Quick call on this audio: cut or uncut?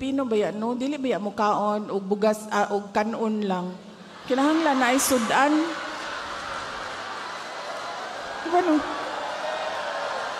uncut